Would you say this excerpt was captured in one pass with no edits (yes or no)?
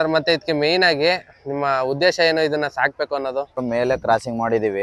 no